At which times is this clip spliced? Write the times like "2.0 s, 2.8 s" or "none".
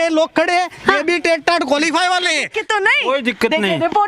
2.7 s